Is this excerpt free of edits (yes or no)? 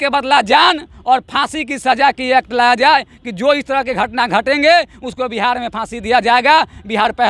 yes